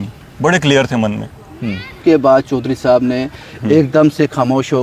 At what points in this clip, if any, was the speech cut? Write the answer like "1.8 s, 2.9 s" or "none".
1.9 s